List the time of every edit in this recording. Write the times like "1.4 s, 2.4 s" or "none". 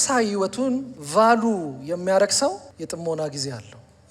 1.0 s, 2.7 s